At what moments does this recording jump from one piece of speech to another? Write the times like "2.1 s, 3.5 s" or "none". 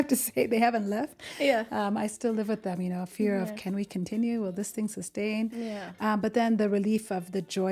none

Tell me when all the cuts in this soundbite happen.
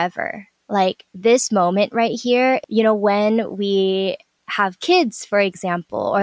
2.6 s

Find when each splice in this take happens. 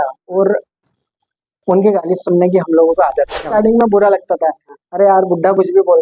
3.5 s

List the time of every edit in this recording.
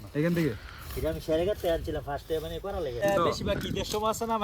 3.0 s

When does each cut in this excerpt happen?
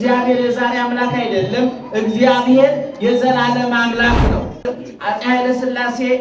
4.7 s

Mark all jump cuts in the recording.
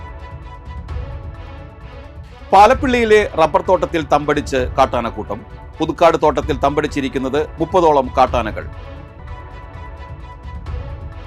1.9 s

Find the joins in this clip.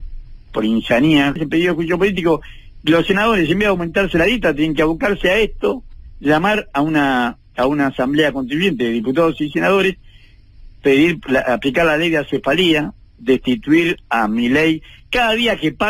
1.4 s

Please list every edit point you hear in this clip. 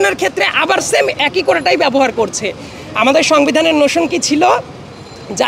none

